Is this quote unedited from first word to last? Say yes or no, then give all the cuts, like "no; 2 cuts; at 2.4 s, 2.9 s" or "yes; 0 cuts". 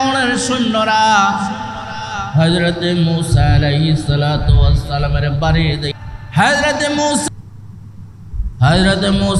no; 2 cuts; at 5.9 s, 7.2 s